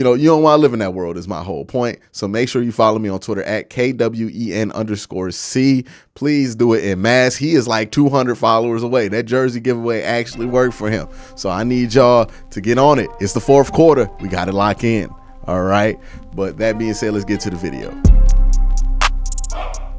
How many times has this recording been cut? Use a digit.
1